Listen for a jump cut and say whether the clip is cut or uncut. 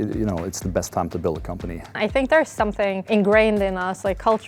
cut